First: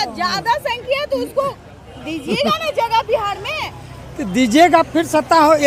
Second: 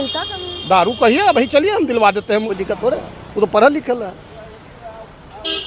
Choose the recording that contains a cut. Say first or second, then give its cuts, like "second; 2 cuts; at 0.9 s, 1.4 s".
second; 1 cut; at 2.5 s